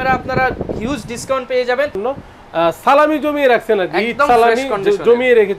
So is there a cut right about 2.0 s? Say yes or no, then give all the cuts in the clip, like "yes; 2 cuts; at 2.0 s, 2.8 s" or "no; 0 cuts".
yes; 1 cut; at 2.0 s